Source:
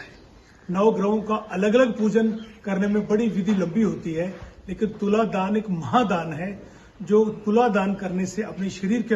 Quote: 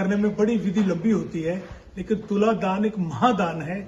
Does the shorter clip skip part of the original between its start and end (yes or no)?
no